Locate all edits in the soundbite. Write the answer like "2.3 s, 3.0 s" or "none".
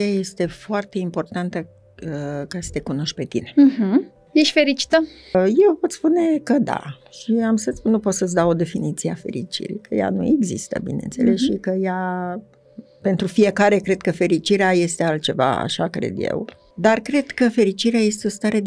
4.2 s, 5.3 s, 16.6 s